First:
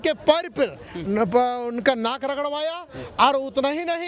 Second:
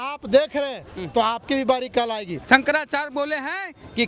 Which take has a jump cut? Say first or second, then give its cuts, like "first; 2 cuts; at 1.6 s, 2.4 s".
second; 1 cut; at 2.3 s